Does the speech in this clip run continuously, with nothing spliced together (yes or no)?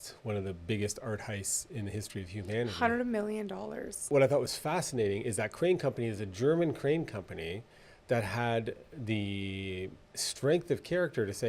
no